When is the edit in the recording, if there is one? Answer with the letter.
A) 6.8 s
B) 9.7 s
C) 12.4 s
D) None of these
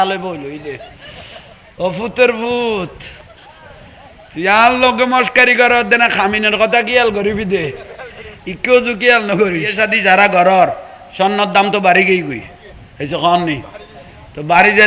B